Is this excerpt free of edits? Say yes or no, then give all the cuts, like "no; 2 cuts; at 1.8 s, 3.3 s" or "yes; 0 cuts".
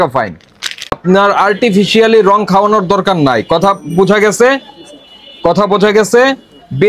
no; 1 cut; at 1.0 s